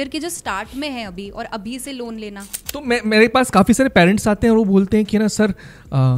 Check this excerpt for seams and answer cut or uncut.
cut